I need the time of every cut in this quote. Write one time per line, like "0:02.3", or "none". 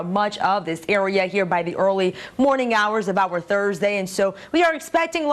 none

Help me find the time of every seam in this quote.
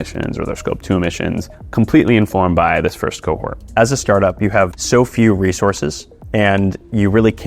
0:01.5
0:03.6
0:04.8

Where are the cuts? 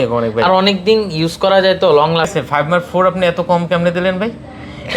0:02.3

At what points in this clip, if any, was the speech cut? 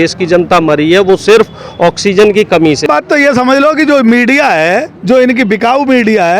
0:02.8

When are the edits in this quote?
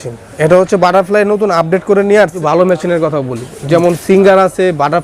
0:02.2

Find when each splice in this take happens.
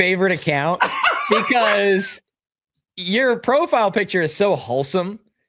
none

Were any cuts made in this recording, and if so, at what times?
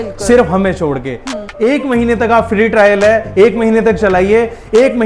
0:01.4

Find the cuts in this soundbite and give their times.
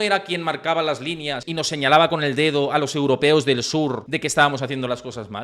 0:01.4
0:04.1

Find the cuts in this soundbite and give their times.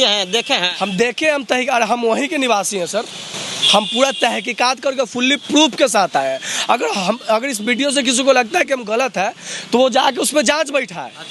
none

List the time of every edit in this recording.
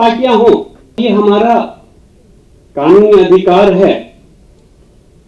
0:01.0

